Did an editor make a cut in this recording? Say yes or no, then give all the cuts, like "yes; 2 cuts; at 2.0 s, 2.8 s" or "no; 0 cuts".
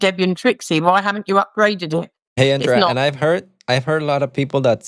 yes; 1 cut; at 2.2 s